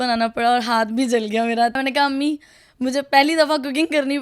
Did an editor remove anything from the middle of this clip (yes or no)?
yes